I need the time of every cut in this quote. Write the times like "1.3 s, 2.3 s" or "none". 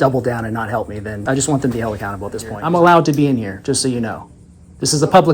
1.1 s, 2.5 s